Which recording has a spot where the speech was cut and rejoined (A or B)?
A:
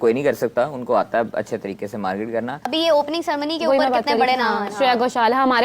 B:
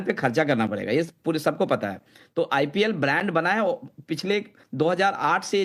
A